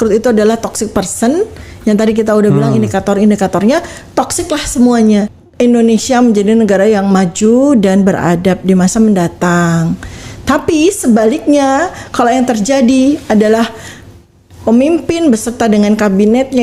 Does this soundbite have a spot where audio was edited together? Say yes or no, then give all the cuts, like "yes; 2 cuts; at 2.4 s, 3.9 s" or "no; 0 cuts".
yes; 1 cut; at 5.3 s